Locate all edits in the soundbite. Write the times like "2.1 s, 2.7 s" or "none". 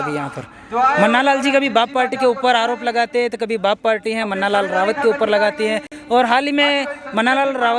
none